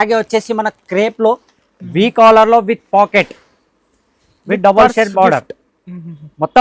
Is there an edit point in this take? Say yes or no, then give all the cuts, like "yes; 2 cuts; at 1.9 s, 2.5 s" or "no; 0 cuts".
no; 0 cuts